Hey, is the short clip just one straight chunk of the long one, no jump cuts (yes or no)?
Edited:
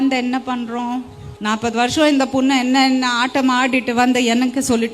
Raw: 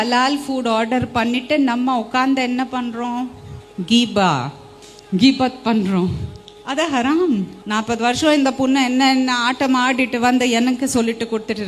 no